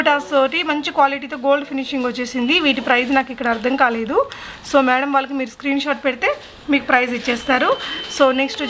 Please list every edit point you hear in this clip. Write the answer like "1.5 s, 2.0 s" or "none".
none